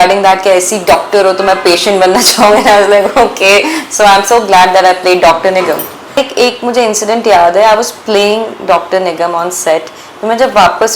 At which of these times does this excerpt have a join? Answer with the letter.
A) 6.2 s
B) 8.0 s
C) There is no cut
A